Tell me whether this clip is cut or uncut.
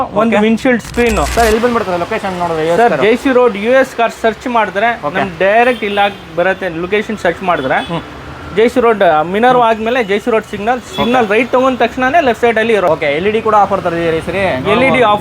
cut